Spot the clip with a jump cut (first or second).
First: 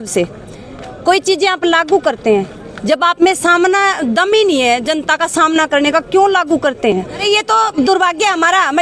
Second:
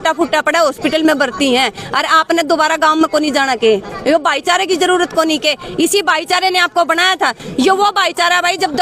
first